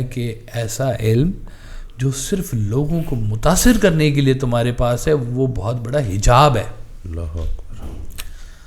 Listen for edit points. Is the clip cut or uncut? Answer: uncut